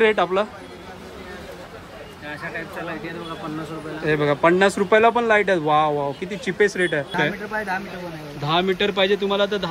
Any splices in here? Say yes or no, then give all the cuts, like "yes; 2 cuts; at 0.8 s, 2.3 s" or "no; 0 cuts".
yes; 2 cuts; at 1.7 s, 7.1 s